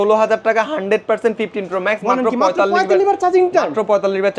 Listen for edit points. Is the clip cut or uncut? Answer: uncut